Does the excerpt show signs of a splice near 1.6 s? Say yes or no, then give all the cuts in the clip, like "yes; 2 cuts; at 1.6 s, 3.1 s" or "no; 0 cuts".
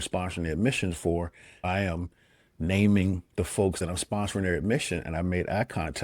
yes; 2 cuts; at 1.6 s, 3.8 s